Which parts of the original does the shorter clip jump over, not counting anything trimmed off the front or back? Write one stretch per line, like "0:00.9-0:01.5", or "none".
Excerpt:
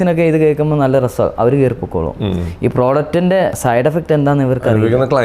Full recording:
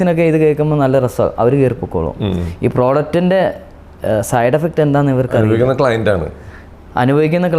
0:03.6-0:04.3